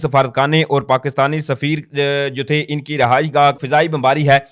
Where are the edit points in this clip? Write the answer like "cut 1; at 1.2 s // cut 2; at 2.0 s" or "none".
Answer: cut 1; at 3.6 s